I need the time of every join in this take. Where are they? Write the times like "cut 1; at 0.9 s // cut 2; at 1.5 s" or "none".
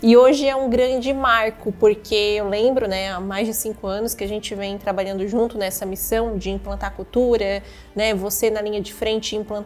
none